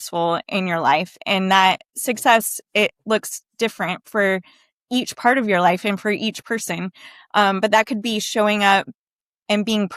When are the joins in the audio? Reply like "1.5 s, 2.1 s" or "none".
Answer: none